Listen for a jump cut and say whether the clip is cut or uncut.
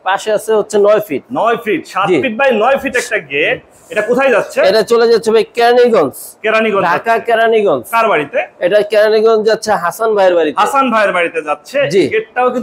uncut